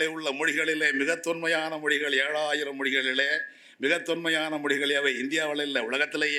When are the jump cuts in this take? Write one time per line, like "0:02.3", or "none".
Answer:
none